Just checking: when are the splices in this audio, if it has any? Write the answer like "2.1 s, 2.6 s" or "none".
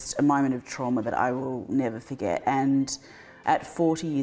3.3 s